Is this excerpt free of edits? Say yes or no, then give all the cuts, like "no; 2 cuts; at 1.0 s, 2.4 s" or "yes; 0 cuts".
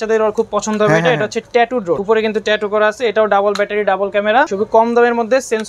no; 2 cuts; at 2.0 s, 4.5 s